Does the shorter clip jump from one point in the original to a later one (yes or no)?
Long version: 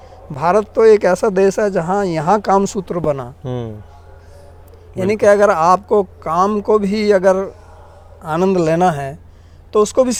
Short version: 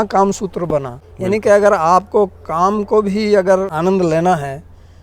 yes